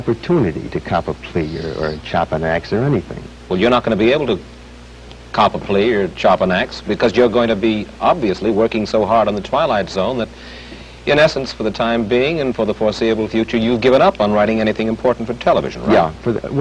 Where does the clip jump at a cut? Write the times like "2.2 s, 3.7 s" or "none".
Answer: 13.0 s